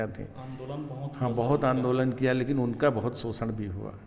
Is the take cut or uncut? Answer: uncut